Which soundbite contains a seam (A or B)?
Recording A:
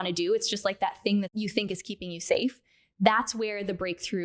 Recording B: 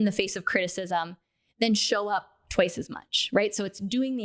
A